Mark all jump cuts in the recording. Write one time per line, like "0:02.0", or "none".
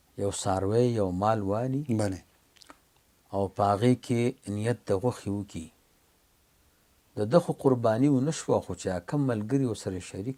none